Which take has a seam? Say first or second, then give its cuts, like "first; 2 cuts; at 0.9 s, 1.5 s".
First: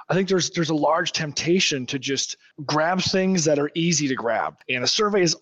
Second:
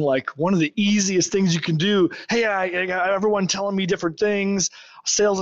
first; 2 cuts; at 2.5 s, 4.5 s